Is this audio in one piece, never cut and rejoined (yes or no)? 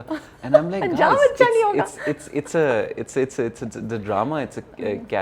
yes